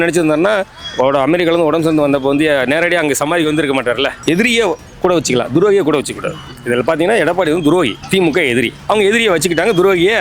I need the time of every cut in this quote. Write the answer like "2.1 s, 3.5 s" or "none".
4.2 s, 8.0 s